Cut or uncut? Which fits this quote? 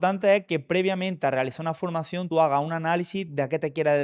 cut